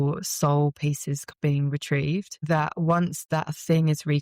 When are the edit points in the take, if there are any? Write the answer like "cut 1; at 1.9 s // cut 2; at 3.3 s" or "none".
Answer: cut 1; at 1.3 s // cut 2; at 2.4 s